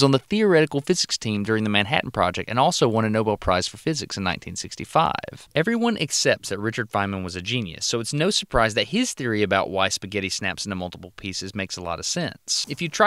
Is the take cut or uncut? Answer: uncut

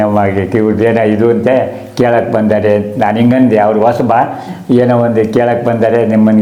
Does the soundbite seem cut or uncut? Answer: uncut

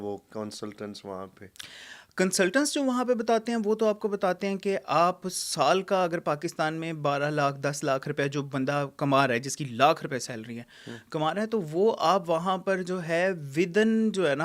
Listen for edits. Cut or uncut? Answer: uncut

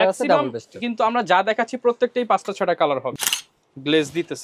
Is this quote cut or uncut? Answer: cut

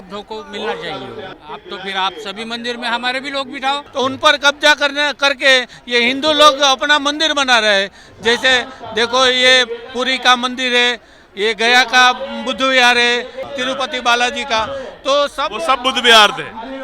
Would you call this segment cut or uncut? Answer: cut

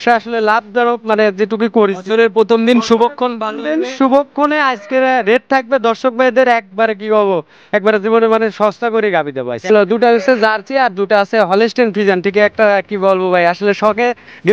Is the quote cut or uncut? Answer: cut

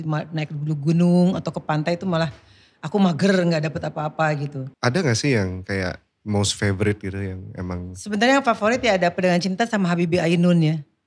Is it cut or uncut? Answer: cut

